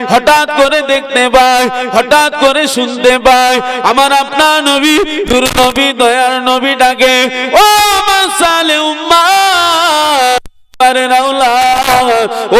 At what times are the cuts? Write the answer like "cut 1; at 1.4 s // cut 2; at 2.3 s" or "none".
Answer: cut 1; at 10.6 s